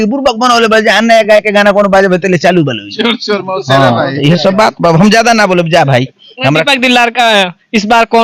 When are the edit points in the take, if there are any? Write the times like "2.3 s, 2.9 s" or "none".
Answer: none